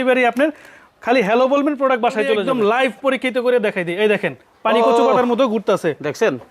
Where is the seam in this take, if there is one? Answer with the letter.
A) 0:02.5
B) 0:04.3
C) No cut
A